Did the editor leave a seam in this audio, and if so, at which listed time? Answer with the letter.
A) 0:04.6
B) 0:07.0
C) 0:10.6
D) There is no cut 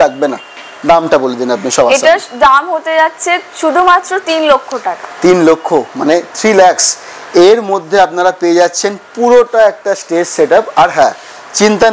D